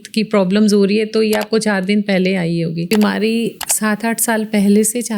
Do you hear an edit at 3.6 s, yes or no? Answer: yes